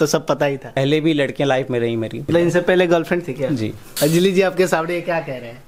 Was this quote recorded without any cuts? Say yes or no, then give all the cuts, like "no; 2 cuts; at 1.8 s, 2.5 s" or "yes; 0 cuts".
no; 3 cuts; at 0.8 s, 2.2 s, 3.8 s